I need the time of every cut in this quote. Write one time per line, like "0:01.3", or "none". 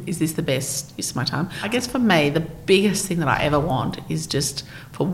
0:01.6